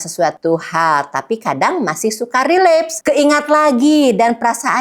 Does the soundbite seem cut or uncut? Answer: uncut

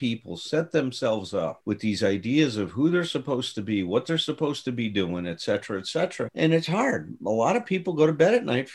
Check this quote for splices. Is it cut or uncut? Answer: uncut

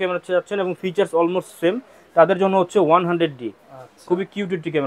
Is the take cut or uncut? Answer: uncut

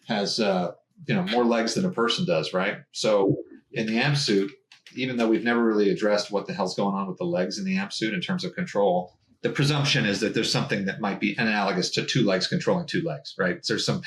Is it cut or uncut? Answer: uncut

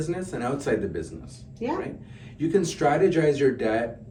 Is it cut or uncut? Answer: uncut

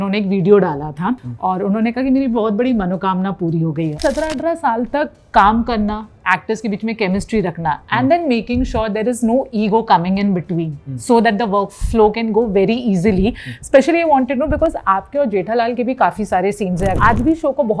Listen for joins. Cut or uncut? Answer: cut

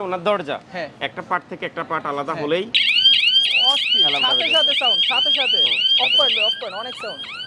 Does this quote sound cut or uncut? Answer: uncut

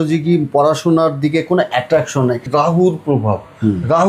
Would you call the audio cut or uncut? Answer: cut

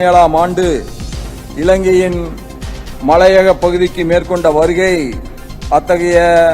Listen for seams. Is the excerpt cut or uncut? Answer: uncut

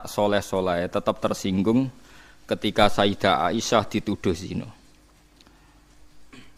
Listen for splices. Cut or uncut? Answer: uncut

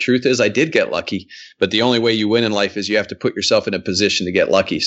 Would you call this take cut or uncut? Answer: uncut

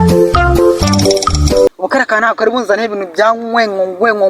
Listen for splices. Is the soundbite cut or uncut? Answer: cut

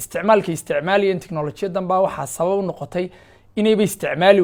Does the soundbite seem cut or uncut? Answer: uncut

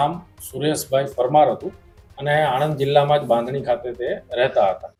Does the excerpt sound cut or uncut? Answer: uncut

